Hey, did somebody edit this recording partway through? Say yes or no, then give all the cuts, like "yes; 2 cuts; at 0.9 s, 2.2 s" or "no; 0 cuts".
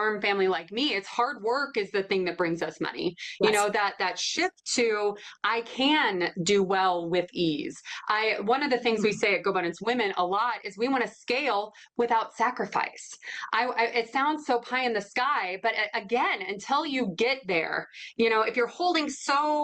no; 0 cuts